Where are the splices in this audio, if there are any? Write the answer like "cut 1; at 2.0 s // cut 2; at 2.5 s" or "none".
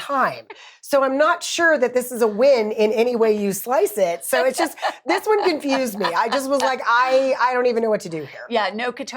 none

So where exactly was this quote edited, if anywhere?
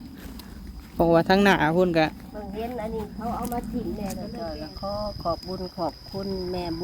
cut 1; at 4.3 s

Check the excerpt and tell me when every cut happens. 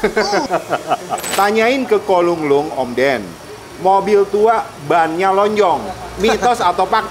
cut 1; at 1.3 s

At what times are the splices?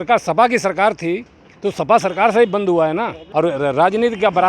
cut 1; at 3.2 s

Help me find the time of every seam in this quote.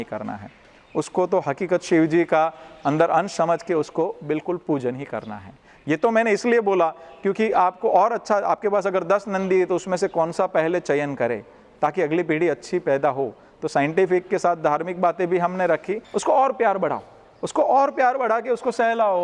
cut 1; at 16.0 s

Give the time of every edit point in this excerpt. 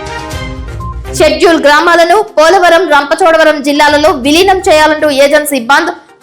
none

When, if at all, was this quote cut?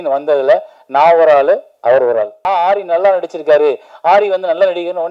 cut 1; at 2.4 s

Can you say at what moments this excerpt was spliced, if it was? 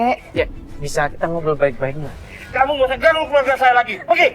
cut 1; at 2.5 s

